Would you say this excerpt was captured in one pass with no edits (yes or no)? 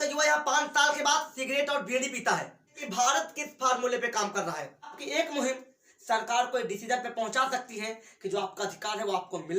no